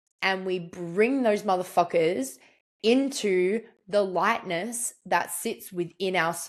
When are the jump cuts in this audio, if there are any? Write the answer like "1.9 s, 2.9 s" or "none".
none